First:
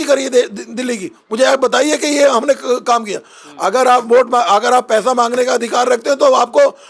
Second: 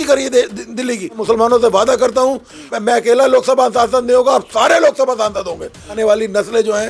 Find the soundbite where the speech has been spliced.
second; 3 cuts; at 1.1 s, 2.7 s, 5.9 s

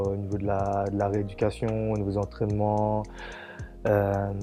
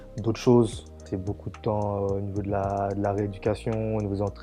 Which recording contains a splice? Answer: second; 1 cut; at 1.1 s

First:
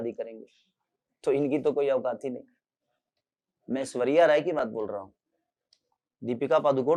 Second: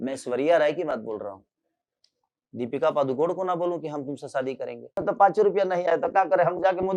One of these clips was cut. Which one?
second; 1 cut; at 5.0 s

